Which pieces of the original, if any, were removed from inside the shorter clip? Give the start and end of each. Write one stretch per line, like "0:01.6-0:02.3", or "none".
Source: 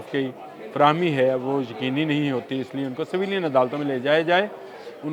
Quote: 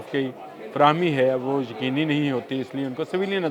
none